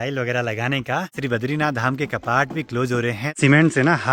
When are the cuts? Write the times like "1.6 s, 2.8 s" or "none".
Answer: 1.2 s, 3.4 s